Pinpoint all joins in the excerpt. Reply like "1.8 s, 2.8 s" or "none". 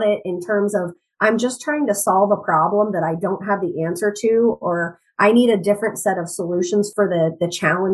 6.9 s